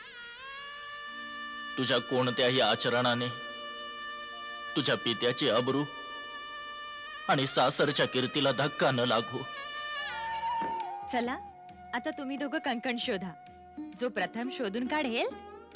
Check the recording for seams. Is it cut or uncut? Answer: cut